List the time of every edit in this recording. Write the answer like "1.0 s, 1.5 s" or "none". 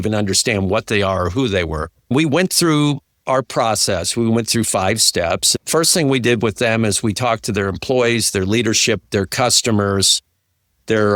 none